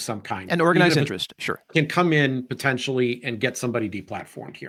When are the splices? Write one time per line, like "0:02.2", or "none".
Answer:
none